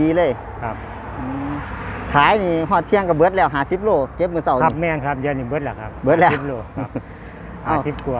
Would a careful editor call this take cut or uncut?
uncut